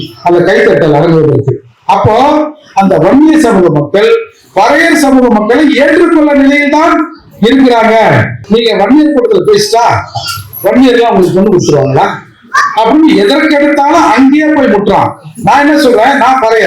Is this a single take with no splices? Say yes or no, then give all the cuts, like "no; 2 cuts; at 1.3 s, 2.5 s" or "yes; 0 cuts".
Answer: no; 1 cut; at 8.3 s